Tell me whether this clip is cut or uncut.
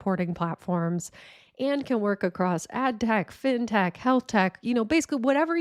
uncut